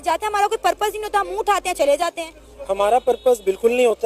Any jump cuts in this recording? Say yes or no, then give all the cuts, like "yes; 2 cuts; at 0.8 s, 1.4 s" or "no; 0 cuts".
no; 0 cuts